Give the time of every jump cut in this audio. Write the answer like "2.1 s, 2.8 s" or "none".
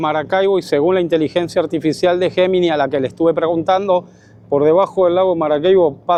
none

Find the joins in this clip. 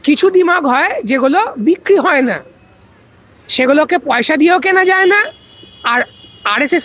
none

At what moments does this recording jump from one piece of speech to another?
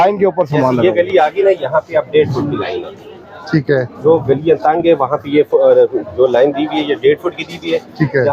none

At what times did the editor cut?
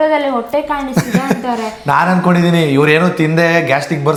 none

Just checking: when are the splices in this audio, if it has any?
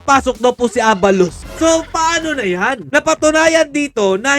1.4 s

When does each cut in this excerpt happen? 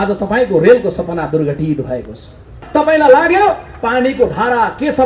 2.6 s

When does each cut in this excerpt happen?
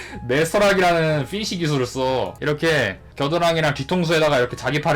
2.4 s

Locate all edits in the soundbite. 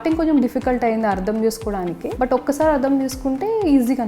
2.0 s

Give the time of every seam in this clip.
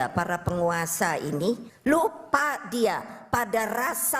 1.7 s

